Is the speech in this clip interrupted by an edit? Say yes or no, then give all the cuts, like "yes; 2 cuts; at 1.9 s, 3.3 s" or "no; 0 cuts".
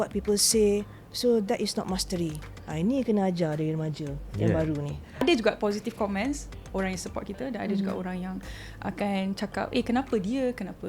yes; 1 cut; at 5.2 s